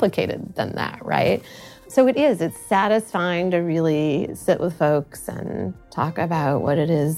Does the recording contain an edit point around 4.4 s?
no; 1 cut; at 5.8 s

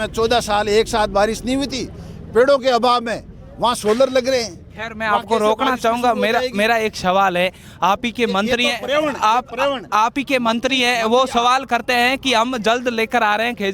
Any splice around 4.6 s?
no; 0 cuts

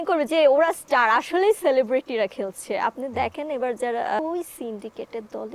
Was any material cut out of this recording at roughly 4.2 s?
yes; 1 cut; at 4.2 s

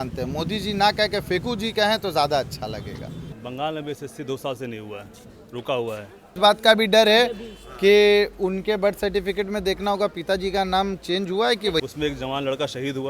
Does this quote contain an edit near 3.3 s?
yes; 3 cuts; at 3.3 s, 6.3 s, 11.8 s

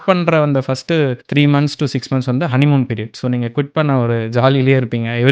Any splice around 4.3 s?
no; 1 cut; at 1.2 s

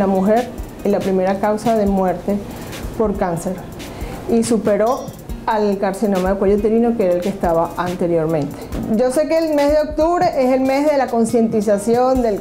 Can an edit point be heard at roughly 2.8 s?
no; 1 cut; at 8.7 s

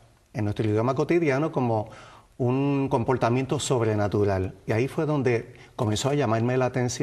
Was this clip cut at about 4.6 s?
no; 0 cuts

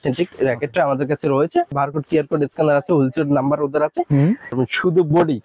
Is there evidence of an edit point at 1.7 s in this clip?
yes; 2 cuts; at 1.7 s, 4.5 s

